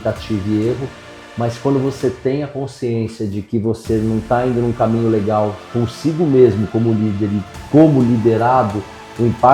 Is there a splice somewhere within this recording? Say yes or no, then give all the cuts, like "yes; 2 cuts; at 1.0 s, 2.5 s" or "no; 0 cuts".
no; 0 cuts